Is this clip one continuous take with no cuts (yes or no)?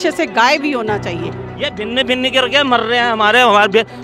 no